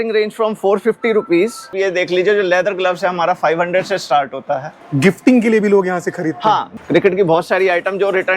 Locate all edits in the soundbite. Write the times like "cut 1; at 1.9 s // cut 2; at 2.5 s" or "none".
cut 1; at 1.7 s // cut 2; at 4.7 s // cut 3; at 6.7 s